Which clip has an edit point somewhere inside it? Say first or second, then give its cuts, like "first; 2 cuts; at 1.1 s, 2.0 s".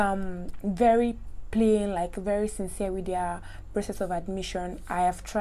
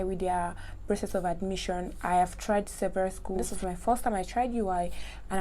second; 1 cut; at 3.5 s